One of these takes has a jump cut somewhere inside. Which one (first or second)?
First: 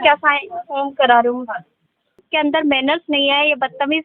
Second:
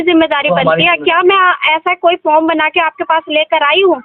first